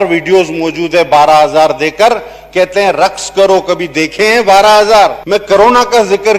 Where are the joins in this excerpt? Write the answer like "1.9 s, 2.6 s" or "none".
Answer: 5.2 s